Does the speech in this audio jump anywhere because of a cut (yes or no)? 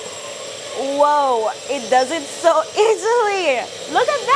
no